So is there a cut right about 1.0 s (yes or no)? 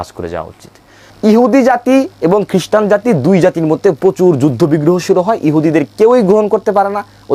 yes